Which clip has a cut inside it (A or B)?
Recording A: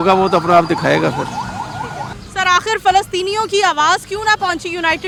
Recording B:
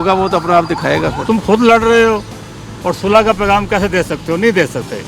B